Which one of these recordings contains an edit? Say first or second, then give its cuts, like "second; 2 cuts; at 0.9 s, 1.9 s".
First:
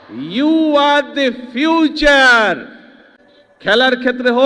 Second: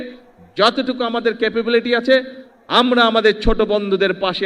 first; 1 cut; at 3.0 s